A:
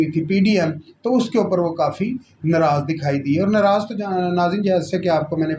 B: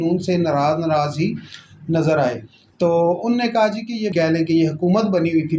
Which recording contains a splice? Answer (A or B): B